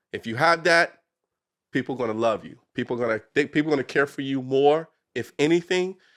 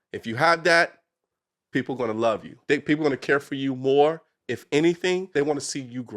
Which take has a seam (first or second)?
second